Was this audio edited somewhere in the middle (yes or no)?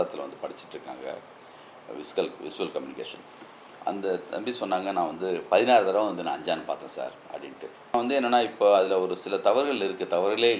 yes